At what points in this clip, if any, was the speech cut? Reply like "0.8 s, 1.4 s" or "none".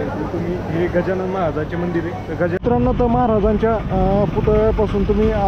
2.6 s